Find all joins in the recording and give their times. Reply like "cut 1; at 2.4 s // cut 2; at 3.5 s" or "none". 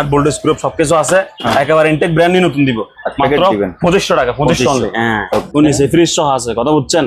cut 1; at 5.5 s